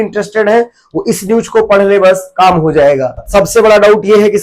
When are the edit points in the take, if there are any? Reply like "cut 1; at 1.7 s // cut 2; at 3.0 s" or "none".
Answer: cut 1; at 3.2 s